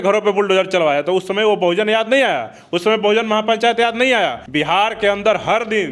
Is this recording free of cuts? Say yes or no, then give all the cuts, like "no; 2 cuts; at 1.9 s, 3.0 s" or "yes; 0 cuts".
no; 1 cut; at 4.4 s